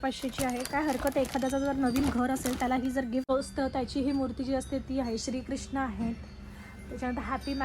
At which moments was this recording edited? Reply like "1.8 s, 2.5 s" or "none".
3.3 s